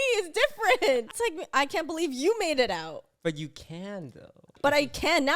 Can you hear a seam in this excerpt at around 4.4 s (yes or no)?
yes